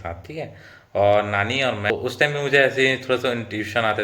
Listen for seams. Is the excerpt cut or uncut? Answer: cut